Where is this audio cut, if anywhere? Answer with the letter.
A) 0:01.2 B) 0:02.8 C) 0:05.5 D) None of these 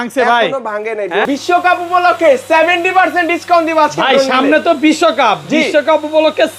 A